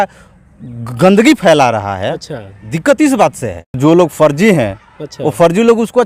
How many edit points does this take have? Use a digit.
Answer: 1